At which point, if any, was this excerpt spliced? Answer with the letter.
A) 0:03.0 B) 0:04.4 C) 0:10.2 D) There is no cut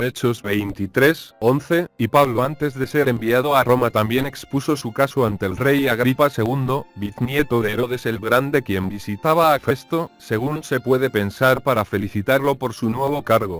D